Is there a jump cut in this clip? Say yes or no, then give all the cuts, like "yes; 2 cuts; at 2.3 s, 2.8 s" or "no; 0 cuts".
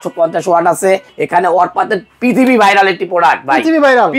yes; 1 cut; at 1.1 s